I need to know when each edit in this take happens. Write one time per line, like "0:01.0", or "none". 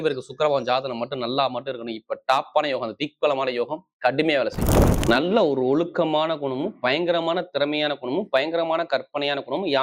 0:04.9